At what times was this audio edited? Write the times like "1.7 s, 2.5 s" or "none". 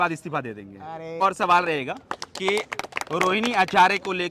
1.2 s